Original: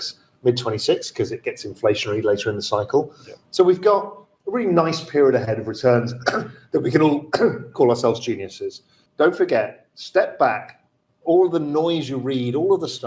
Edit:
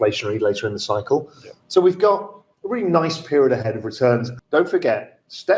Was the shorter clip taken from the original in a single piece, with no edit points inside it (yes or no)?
no